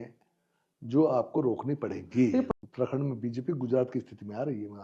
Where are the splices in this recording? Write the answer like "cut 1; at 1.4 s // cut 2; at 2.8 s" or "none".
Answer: cut 1; at 2.5 s